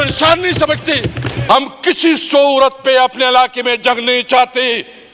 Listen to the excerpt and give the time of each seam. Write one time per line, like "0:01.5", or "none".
0:01.3